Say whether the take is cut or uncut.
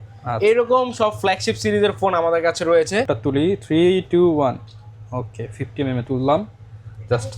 cut